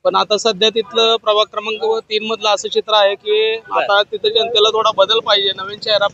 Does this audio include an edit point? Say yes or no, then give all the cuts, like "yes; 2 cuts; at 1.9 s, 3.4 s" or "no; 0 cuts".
yes; 1 cut; at 3.6 s